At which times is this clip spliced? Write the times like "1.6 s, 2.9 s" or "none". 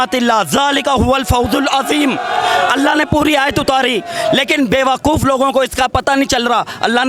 none